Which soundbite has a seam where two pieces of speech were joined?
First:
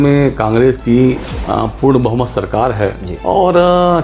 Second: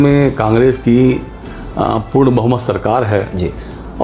first; 2 cuts; at 1.3 s, 3.1 s

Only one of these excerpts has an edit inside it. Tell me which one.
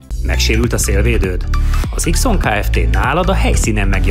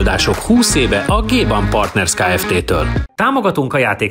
second; 1 cut; at 3.0 s

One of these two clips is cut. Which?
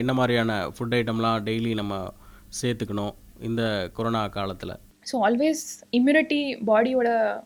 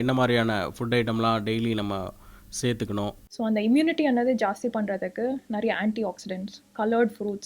second; 1 cut; at 3.2 s

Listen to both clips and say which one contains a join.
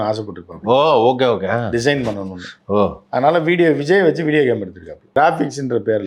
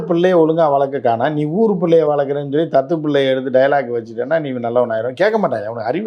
first; 1 cut; at 5.2 s

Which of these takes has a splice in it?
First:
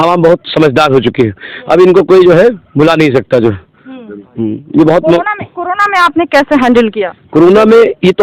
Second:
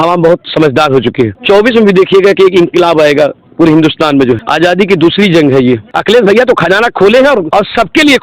second; 4 cuts; at 1.4 s, 4.5 s, 5.9 s, 7.5 s

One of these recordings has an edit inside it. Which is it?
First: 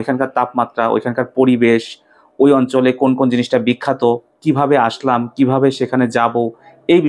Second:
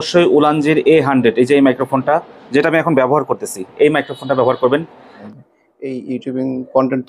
second; 1 cut; at 5.1 s

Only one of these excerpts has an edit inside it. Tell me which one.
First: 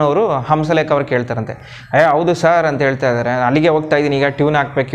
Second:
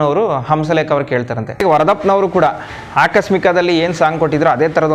second; 1 cut; at 1.6 s

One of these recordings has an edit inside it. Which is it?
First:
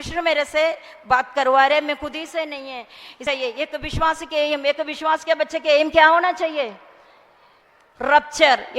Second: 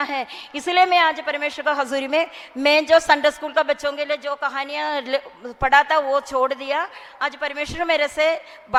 first; 1 cut; at 3.2 s

